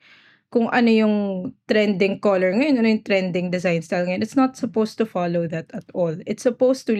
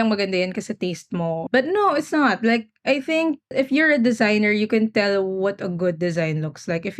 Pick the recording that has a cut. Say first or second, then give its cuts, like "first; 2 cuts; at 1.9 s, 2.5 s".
second; 2 cuts; at 1.4 s, 3.5 s